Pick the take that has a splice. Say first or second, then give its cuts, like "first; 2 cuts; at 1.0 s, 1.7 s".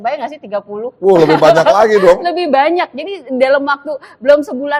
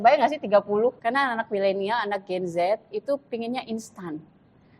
second; 1 cut; at 1.0 s